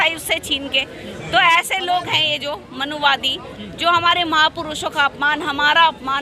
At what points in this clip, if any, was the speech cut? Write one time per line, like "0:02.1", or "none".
none